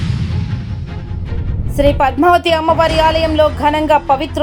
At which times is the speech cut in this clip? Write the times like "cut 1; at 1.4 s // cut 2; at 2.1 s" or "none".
none